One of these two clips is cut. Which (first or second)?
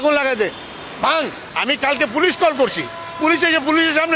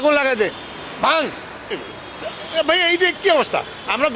first